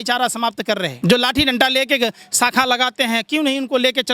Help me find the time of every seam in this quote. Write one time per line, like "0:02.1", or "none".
0:00.9